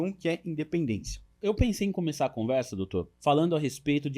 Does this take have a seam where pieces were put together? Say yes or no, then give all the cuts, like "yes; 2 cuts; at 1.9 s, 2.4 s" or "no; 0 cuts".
yes; 2 cuts; at 1.3 s, 3.1 s